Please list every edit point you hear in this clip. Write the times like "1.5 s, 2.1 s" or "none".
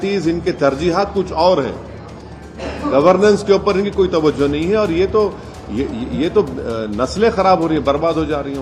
none